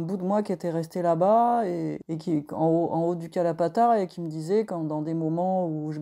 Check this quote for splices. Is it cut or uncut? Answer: cut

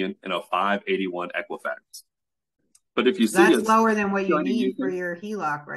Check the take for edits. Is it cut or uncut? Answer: cut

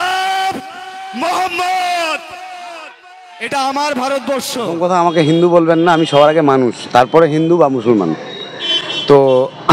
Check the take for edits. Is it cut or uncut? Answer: cut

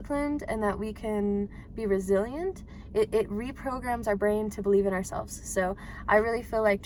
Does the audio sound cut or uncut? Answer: uncut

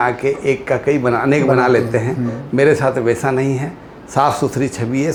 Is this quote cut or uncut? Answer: uncut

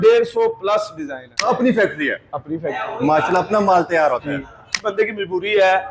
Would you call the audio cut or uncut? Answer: cut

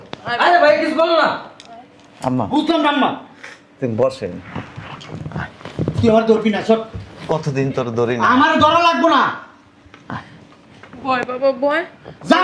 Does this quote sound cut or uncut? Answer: uncut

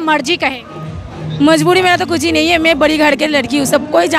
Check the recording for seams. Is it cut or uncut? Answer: uncut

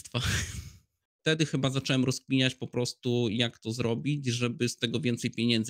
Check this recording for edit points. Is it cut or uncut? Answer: cut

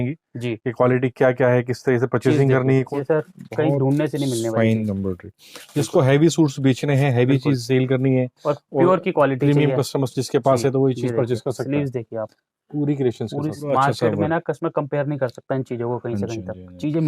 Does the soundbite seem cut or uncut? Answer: cut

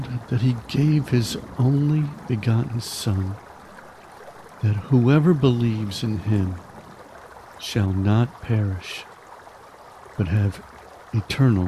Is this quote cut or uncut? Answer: cut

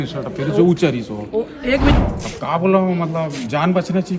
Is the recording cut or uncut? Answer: cut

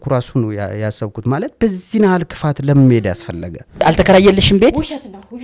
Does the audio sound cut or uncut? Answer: cut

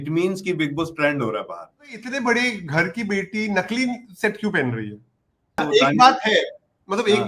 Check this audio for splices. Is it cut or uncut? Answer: cut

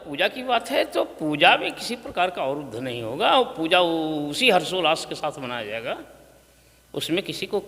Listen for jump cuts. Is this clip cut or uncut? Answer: uncut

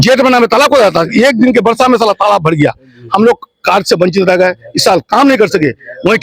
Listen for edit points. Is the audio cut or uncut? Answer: uncut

